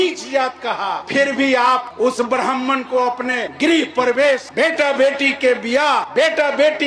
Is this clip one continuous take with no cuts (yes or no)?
no